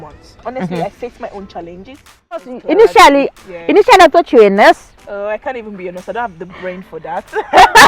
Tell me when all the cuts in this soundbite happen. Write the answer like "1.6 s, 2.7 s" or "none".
2.4 s